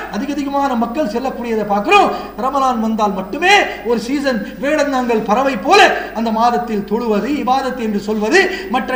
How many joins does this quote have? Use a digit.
0